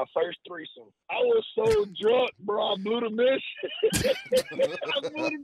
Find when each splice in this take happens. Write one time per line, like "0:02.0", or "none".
0:01.0